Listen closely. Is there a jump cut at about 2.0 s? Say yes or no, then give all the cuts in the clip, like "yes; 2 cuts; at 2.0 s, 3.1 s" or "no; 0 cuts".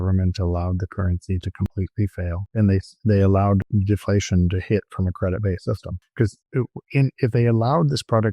yes; 3 cuts; at 2.0 s, 3.7 s, 6.3 s